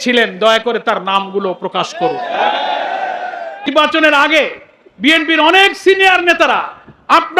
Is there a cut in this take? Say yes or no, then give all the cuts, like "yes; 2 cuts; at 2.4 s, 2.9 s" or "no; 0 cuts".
yes; 1 cut; at 3.7 s